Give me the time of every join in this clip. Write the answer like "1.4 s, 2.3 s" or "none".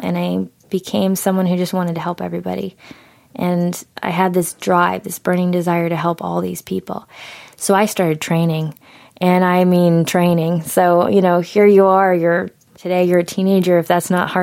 12.8 s